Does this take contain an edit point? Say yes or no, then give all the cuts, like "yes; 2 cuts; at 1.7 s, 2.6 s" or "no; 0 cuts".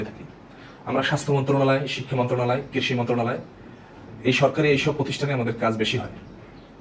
no; 0 cuts